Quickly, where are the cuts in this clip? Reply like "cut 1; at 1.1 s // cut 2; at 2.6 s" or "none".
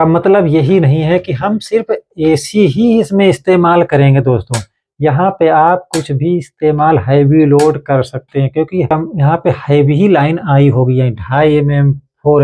cut 1; at 8.9 s